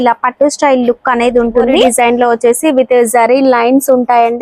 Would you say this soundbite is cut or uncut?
cut